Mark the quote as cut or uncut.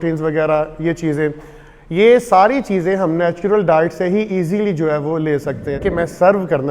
cut